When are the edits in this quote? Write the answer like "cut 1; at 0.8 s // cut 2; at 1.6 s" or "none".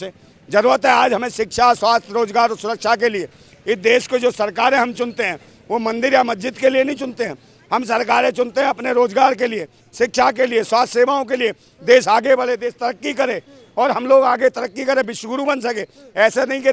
none